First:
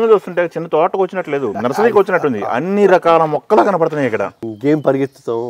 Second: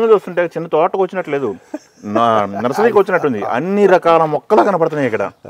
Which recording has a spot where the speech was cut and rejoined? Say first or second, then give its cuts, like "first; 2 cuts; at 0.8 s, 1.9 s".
first; 2 cuts; at 1.6 s, 4.5 s